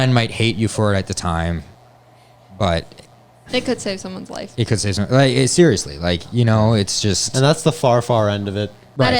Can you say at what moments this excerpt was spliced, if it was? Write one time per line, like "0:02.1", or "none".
none